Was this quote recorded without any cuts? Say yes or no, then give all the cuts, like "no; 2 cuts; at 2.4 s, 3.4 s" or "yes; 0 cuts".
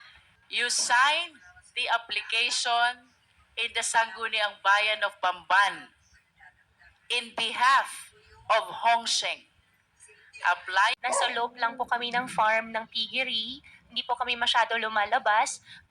no; 1 cut; at 11.0 s